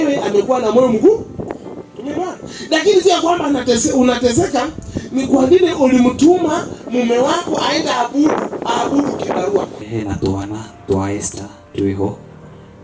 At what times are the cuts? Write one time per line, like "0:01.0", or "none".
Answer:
0:09.8